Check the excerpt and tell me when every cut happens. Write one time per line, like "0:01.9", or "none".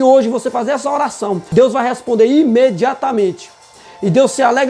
0:01.4